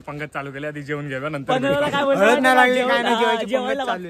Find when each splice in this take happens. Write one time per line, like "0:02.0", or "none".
none